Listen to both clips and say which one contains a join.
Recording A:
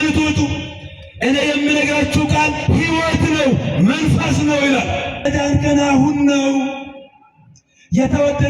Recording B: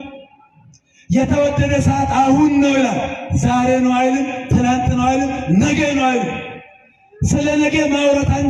A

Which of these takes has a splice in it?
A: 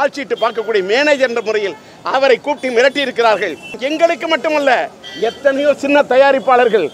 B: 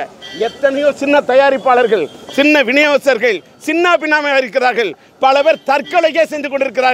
A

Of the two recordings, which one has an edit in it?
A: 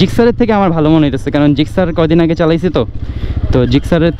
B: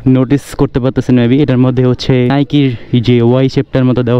B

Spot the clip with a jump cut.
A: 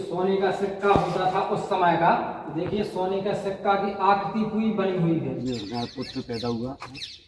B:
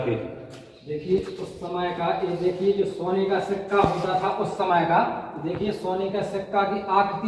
A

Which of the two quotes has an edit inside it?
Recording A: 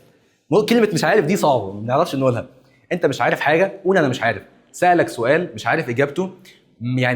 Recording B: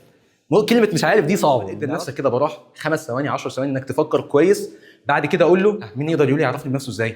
B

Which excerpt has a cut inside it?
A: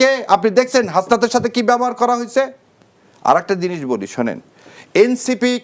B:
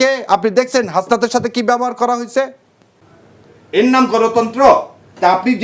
B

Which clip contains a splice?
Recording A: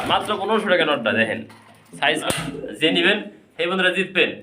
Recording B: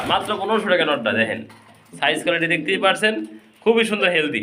A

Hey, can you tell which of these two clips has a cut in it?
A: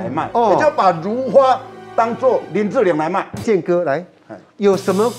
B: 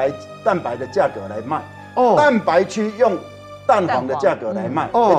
A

